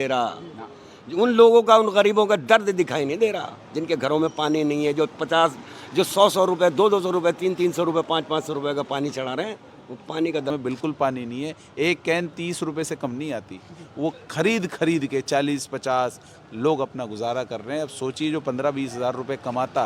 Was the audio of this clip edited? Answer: yes; 1 cut; at 10.5 s

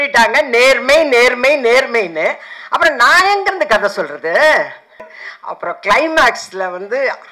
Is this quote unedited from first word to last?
no; 1 cut; at 5.0 s

